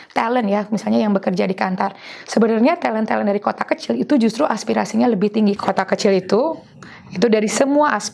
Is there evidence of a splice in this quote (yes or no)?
yes